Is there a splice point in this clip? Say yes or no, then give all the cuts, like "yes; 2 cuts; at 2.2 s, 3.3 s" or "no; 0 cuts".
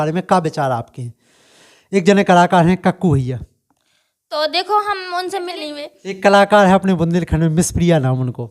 yes; 1 cut; at 5.6 s